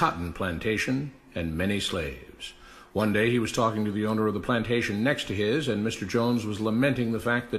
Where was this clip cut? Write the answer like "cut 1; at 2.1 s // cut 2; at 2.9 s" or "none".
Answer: cut 1; at 2.2 s